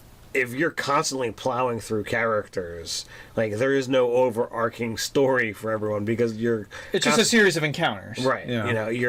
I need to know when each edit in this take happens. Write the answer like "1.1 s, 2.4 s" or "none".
none